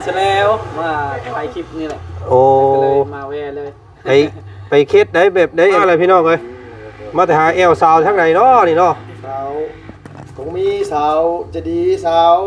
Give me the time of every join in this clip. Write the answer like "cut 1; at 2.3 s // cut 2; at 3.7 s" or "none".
cut 1; at 5.8 s